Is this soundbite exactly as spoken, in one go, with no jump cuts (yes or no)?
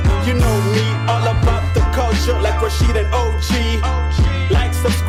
yes